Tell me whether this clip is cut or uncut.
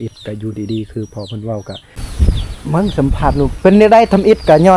cut